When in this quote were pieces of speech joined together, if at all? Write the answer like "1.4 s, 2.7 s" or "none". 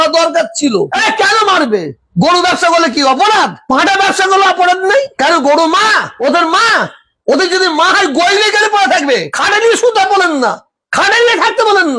0.9 s, 5.1 s